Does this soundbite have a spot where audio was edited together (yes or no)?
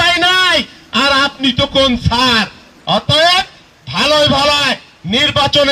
yes